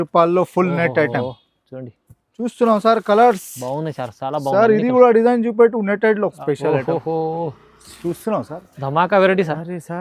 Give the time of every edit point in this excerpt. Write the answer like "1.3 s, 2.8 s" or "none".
6.4 s